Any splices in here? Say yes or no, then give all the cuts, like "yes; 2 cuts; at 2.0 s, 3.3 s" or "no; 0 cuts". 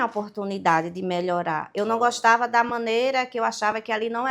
no; 0 cuts